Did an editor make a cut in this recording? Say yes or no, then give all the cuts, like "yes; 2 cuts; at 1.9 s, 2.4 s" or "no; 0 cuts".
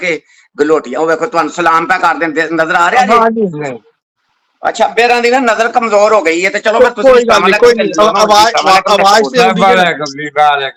no; 0 cuts